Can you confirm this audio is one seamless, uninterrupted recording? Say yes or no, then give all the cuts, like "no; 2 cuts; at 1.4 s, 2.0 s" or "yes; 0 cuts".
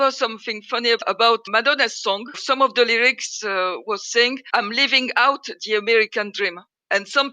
no; 2 cuts; at 1.4 s, 4.4 s